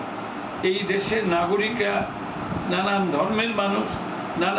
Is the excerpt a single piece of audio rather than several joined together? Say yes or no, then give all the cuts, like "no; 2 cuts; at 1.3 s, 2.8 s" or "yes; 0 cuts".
yes; 0 cuts